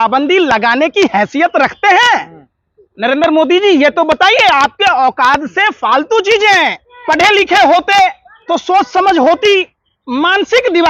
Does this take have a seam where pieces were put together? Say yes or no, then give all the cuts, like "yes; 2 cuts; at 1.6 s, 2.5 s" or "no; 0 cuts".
yes; 1 cut; at 6.9 s